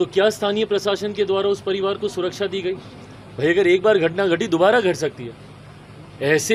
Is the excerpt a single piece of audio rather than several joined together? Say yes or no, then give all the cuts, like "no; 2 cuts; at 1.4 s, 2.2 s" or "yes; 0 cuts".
yes; 0 cuts